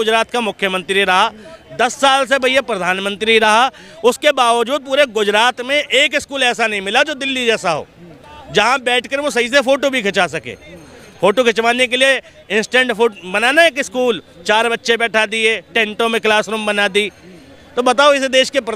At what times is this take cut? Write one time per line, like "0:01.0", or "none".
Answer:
none